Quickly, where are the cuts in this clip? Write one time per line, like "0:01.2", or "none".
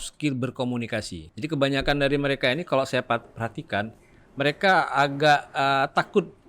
0:01.2